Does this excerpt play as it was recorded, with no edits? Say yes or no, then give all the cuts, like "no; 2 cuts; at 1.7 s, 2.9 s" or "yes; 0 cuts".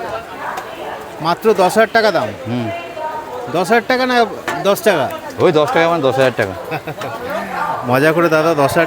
no; 1 cut; at 4.5 s